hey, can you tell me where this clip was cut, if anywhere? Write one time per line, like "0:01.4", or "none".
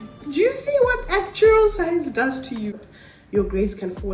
0:02.8